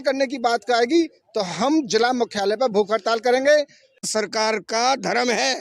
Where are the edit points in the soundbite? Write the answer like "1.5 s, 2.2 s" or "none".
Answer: 4.1 s